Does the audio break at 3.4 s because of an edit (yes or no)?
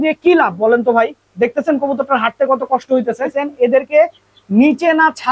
yes